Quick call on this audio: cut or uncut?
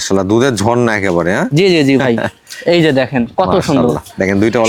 uncut